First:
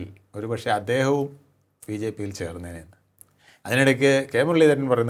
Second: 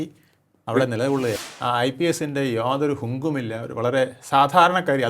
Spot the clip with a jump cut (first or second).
second